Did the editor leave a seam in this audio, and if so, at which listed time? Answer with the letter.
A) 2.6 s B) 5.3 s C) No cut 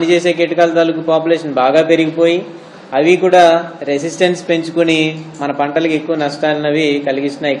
C